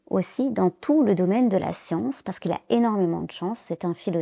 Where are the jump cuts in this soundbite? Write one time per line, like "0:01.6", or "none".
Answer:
none